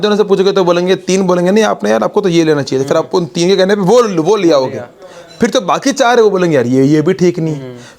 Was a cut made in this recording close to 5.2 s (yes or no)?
no